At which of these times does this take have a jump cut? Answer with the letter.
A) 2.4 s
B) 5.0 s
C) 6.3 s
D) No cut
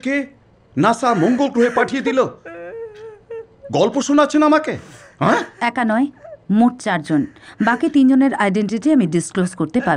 D